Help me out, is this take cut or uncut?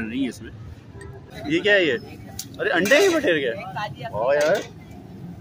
cut